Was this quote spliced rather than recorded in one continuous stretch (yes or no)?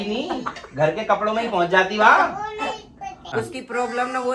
yes